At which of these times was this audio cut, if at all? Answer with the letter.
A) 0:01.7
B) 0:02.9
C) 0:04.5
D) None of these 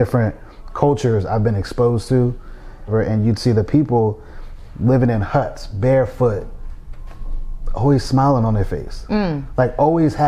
B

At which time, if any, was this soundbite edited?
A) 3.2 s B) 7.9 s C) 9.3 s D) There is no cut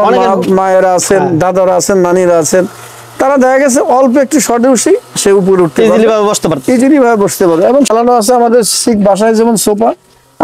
B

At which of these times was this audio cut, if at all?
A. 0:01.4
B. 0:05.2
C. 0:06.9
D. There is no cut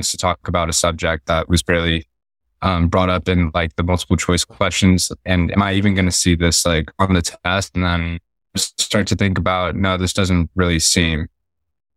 D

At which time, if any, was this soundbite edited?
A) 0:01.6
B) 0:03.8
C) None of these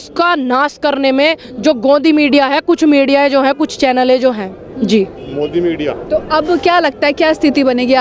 C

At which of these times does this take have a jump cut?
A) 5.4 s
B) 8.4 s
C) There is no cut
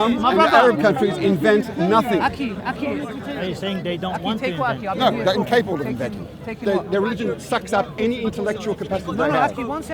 C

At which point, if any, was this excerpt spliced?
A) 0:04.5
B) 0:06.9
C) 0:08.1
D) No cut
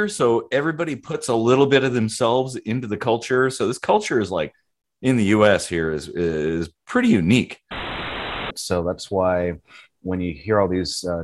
C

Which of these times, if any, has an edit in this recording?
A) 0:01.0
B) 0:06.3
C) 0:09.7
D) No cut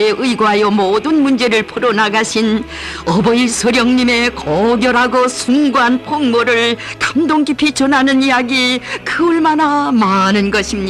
C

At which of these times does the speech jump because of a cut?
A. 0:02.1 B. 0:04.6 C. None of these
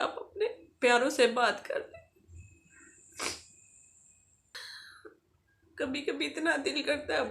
B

